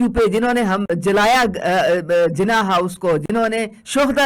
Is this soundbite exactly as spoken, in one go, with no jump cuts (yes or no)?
yes